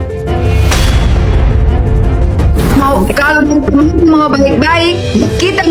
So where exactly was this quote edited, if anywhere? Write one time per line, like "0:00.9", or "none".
none